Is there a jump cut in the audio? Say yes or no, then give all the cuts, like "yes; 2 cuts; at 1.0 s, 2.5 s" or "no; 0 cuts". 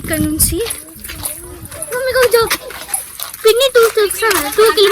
no; 0 cuts